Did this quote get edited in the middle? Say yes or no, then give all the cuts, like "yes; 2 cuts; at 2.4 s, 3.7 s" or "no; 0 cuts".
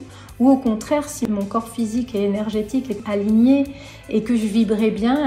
yes; 2 cuts; at 1.2 s, 3.0 s